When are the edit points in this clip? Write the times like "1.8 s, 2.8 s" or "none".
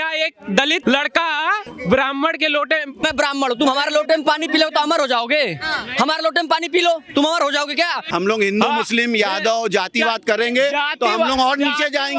0.8 s, 1.7 s, 3.0 s, 8.0 s